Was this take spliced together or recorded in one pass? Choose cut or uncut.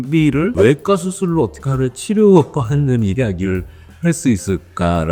uncut